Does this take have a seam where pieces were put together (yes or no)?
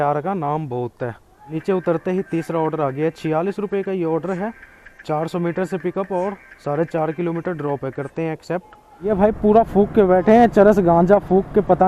yes